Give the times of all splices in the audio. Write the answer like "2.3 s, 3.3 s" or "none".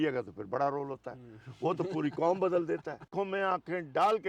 3.1 s